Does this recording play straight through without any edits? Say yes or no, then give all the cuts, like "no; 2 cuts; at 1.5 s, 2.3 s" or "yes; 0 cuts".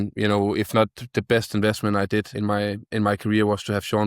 no; 1 cut; at 2.3 s